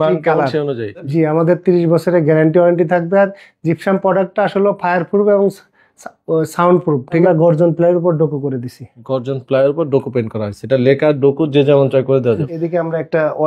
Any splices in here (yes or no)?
yes